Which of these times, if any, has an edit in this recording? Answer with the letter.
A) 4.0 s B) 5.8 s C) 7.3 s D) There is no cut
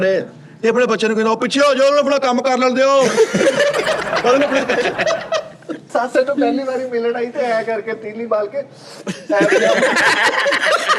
B